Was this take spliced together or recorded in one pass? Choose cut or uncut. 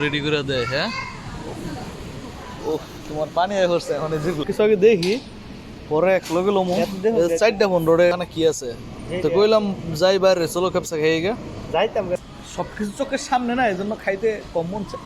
cut